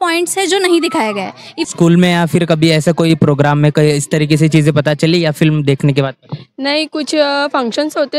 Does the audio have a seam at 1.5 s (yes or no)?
yes